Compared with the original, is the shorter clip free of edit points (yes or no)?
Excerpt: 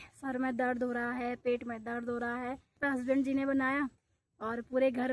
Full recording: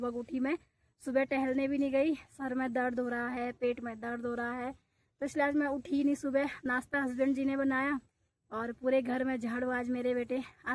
no